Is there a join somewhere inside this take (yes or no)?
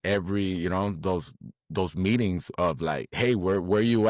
yes